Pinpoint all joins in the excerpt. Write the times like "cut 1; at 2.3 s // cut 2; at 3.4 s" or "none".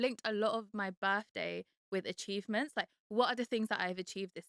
none